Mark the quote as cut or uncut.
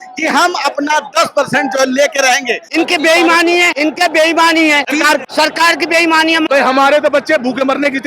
cut